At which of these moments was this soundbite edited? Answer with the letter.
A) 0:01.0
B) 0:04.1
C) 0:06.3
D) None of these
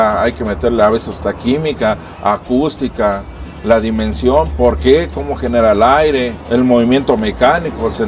D